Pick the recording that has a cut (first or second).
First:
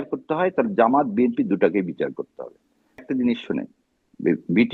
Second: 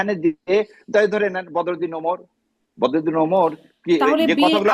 first